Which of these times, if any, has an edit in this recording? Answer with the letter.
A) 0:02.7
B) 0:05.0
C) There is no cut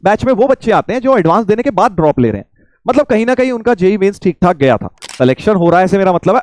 B